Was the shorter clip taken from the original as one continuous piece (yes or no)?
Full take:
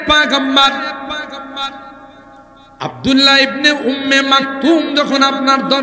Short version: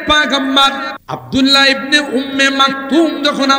no